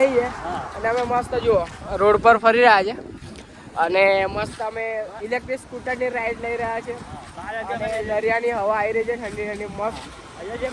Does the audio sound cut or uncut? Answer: uncut